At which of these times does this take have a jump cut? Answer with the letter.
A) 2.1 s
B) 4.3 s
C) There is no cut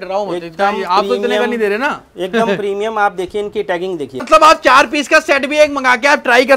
B